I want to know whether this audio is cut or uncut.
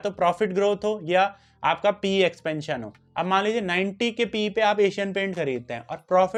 uncut